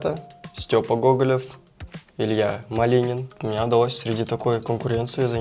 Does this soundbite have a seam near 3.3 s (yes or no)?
yes